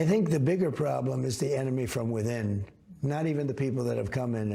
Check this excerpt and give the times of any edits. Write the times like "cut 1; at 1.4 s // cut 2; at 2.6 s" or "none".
none